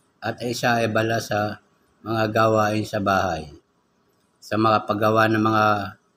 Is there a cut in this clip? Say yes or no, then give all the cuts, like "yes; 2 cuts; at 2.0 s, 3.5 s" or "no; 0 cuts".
no; 0 cuts